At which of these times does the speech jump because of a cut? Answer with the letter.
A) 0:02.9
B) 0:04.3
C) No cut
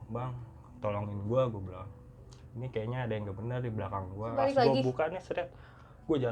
B